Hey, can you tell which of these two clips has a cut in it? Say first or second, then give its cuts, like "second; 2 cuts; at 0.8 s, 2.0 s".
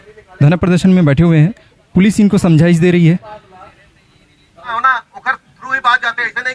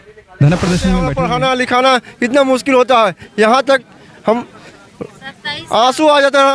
second; 1 cut; at 1.2 s